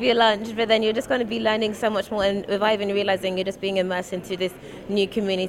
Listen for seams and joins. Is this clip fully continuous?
yes; 0 cuts

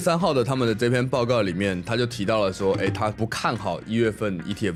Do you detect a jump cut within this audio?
no; 0 cuts

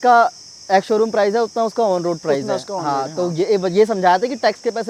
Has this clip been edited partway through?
no; 0 cuts

